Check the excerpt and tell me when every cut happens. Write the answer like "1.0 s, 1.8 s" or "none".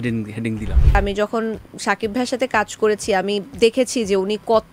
1.0 s

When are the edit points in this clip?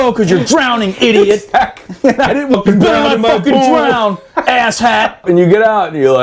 2.5 s, 5.2 s

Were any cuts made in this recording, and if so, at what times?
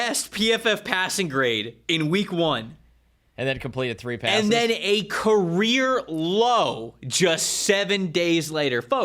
none

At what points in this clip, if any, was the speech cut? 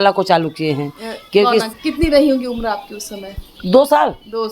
1.7 s

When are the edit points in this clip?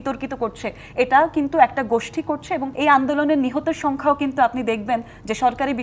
2.7 s

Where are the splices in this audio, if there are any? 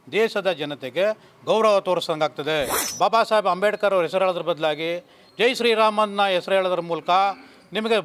2.9 s

